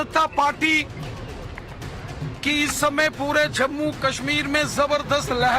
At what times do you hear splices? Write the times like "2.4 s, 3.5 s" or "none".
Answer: 1.4 s